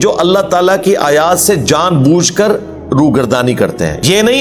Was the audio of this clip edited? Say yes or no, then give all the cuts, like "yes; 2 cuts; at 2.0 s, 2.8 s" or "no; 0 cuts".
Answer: no; 0 cuts